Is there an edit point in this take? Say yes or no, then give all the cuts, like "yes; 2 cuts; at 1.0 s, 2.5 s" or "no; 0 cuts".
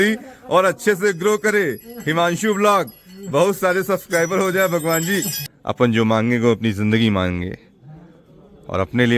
yes; 1 cut; at 5.4 s